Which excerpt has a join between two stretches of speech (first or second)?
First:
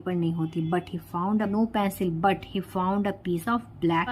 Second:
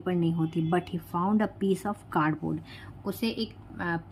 first